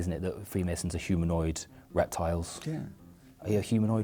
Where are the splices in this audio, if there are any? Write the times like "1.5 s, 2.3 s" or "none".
none